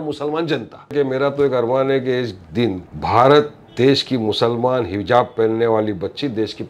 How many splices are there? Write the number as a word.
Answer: two